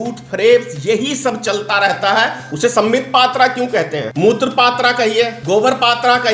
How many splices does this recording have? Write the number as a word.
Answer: three